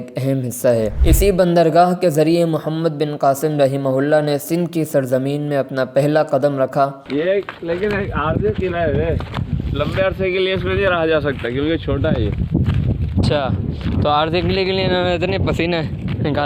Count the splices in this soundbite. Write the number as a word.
two